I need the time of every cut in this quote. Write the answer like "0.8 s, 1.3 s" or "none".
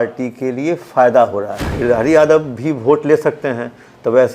1.6 s